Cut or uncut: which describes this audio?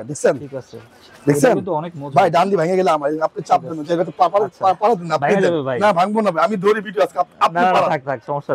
uncut